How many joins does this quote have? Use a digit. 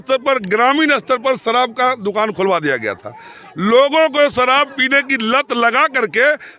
0